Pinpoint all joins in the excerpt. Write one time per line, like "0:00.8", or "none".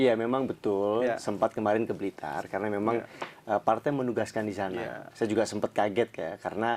none